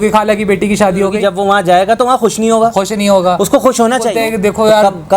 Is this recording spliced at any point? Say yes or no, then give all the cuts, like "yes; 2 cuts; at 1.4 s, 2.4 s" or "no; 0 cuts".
yes; 2 cuts; at 1.2 s, 4.1 s